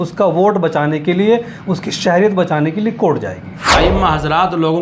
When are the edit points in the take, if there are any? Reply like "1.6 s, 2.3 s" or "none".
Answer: 3.7 s